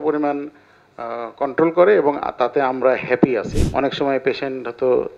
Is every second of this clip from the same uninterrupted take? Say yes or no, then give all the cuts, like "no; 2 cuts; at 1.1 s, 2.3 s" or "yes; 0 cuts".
no; 1 cut; at 3.6 s